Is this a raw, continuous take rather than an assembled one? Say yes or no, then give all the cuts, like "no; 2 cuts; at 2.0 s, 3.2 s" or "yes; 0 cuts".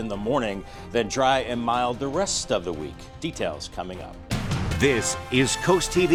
yes; 0 cuts